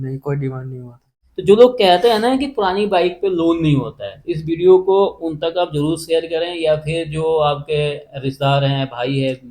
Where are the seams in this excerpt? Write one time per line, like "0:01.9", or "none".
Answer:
0:01.1

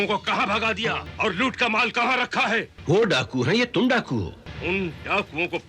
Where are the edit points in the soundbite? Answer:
0:01.1
0:02.7
0:04.4

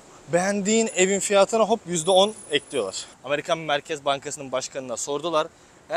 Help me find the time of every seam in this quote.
0:03.1

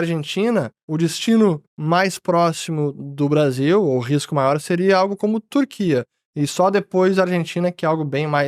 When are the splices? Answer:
none

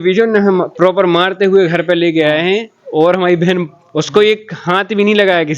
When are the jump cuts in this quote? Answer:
none

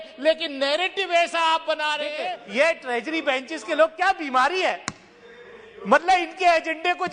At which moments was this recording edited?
0:02.2

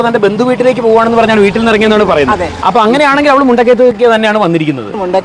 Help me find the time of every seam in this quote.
none

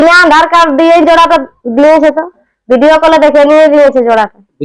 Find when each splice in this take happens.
0:02.5

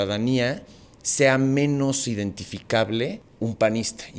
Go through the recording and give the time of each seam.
0:03.2

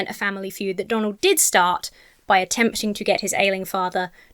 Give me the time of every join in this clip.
none

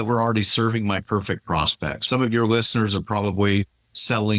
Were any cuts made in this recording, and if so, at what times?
0:02.0

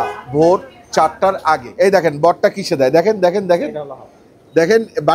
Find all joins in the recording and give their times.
0:01.7

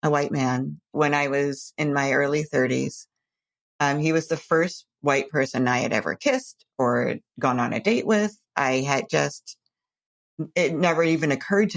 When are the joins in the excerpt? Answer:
0:00.9

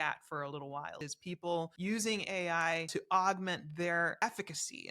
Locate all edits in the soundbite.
0:01.5
0:02.9
0:04.2

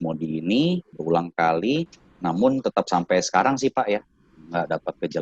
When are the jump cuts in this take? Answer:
0:00.9
0:02.0

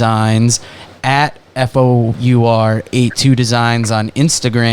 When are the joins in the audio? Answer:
0:02.2

